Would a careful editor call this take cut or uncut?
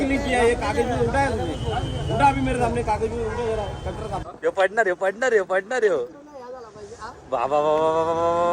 cut